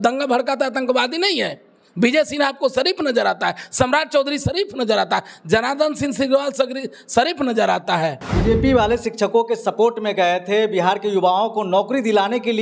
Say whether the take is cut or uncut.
cut